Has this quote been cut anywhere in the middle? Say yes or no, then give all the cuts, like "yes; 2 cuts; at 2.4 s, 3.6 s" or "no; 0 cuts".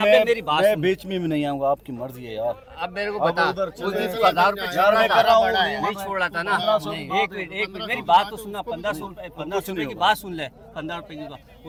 no; 0 cuts